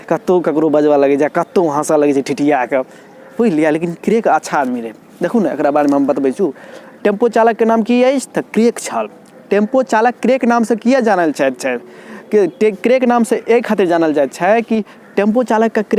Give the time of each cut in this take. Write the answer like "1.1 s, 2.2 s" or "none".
15.0 s